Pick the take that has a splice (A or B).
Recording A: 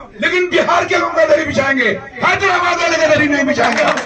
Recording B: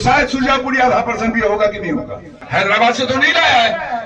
B